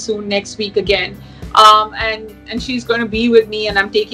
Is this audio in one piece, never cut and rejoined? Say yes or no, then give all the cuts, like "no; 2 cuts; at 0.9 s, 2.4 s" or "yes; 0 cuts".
yes; 0 cuts